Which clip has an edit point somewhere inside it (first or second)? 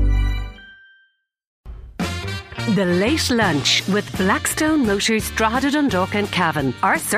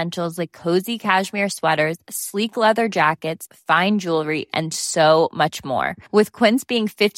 first